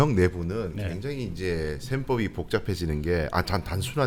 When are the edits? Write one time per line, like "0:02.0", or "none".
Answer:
none